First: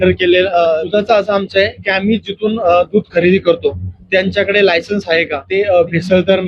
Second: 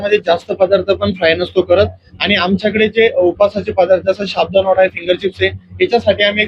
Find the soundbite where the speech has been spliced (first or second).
first